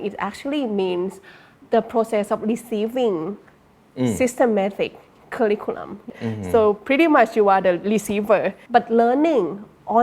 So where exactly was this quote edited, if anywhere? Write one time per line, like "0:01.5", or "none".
0:01.5
0:06.1
0:08.6